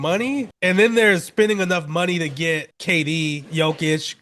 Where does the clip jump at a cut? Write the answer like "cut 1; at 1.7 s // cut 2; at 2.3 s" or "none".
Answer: none